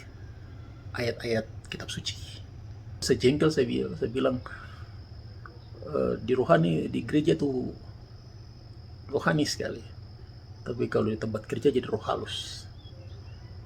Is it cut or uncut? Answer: cut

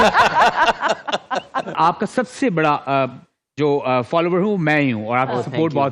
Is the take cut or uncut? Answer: cut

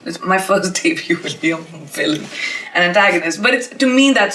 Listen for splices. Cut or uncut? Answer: uncut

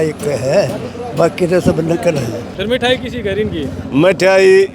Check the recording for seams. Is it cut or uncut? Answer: cut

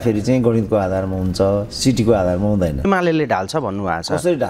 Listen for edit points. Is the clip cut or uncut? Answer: cut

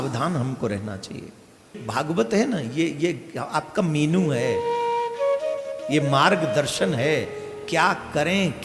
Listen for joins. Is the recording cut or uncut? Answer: cut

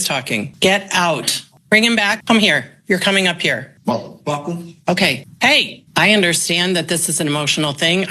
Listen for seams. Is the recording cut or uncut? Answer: cut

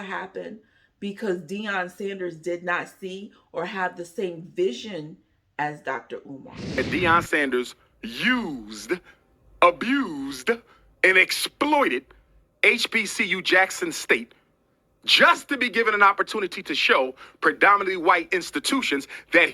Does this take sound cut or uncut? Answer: cut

